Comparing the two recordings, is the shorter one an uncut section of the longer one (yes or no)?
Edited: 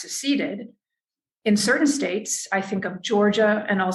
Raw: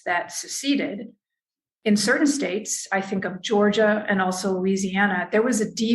yes